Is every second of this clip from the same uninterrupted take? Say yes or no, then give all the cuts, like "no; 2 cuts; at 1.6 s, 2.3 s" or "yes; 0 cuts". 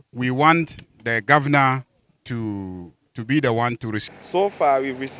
no; 1 cut; at 4.1 s